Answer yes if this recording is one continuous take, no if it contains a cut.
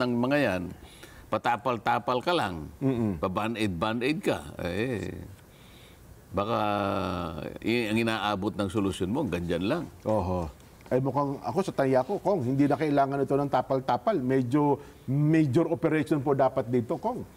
yes